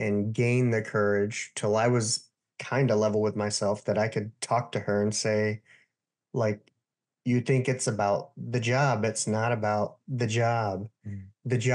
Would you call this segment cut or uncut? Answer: uncut